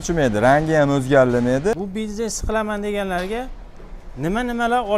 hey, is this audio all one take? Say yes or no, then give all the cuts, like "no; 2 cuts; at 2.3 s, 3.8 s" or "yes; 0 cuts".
no; 1 cut; at 1.8 s